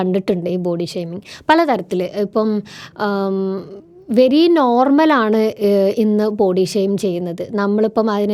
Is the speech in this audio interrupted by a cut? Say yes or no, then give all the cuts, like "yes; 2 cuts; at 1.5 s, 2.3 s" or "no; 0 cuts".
no; 0 cuts